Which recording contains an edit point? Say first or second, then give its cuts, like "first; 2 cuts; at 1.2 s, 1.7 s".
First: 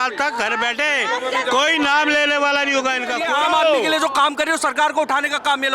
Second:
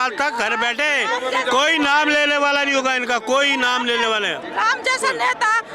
first; 1 cut; at 3.2 s